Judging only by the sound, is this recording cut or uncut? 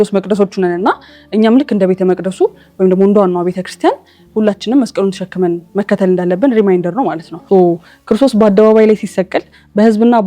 cut